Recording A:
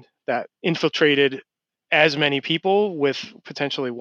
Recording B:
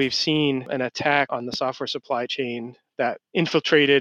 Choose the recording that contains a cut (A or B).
B